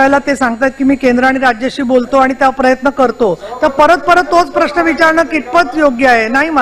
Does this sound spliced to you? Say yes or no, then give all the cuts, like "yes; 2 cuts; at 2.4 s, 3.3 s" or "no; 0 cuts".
no; 0 cuts